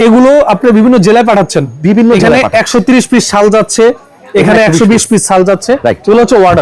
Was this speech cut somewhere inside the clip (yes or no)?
no